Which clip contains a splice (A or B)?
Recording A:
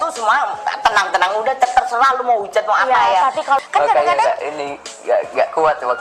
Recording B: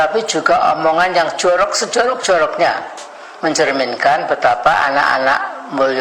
A